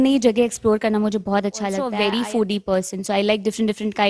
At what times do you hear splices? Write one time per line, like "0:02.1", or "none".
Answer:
0:01.8